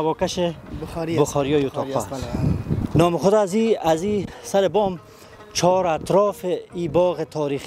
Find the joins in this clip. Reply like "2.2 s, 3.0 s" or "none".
2.8 s